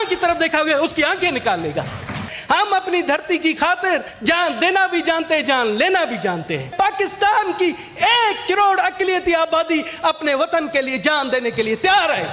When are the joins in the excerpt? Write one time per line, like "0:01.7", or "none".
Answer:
0:02.3
0:04.1
0:06.7